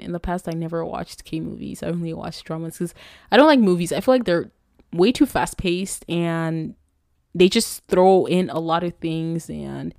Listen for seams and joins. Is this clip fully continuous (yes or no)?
yes